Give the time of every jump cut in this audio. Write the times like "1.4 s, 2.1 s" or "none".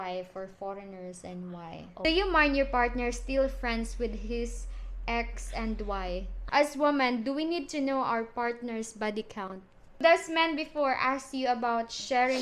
1.9 s, 6.5 s, 10.0 s